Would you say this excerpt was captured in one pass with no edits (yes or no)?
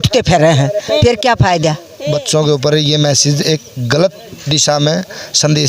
no